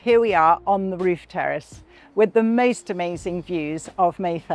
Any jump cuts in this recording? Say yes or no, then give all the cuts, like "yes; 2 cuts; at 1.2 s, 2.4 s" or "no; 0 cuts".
no; 0 cuts